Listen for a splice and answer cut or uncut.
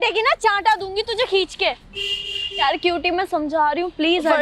uncut